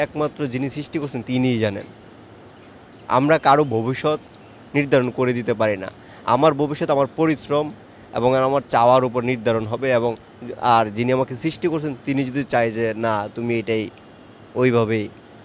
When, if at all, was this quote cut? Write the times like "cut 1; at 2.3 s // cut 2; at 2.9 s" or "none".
none